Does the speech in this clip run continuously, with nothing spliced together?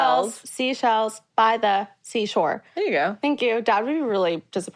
yes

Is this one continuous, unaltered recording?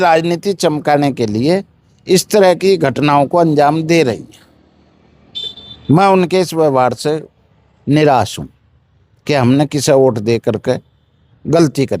yes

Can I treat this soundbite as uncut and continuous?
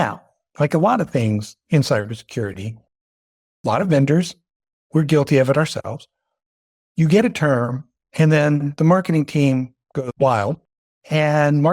no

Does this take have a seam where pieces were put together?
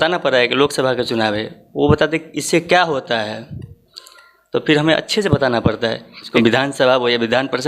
yes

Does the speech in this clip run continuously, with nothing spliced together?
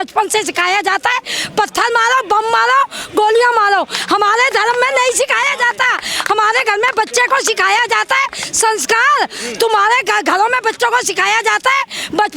yes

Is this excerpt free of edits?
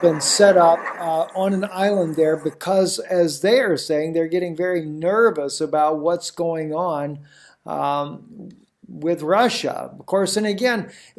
no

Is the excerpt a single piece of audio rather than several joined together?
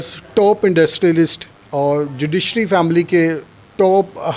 yes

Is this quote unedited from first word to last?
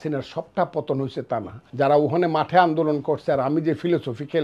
no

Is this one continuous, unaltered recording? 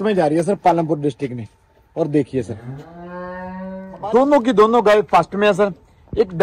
no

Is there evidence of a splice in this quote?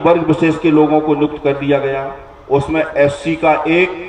no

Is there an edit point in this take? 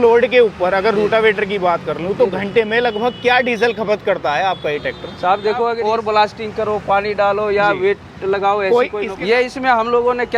yes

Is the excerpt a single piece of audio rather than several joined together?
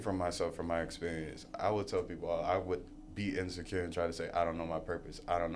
yes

